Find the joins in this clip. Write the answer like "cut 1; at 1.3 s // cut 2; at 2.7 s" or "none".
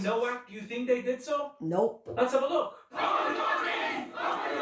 cut 1; at 2.9 s